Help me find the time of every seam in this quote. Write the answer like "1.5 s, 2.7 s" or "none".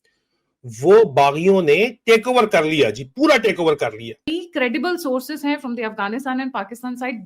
4.4 s